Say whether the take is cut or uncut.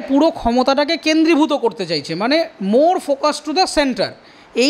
uncut